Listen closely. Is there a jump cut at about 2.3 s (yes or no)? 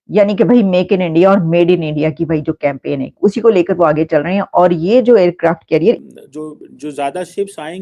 no